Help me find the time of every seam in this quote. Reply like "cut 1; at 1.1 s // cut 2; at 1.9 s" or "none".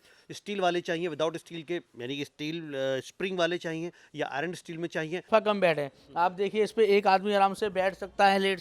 cut 1; at 5.3 s